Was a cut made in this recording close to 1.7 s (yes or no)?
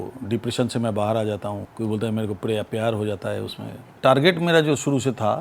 yes